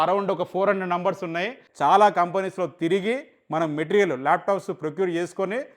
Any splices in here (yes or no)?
yes